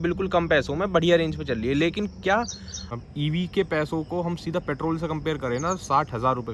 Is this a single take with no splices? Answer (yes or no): no